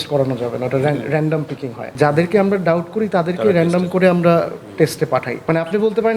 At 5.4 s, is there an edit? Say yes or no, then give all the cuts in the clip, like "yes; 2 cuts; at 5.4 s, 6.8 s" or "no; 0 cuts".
yes; 2 cuts; at 1.9 s, 5.4 s